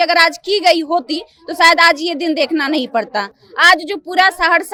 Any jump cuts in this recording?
no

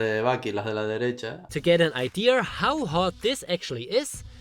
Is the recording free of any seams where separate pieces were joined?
no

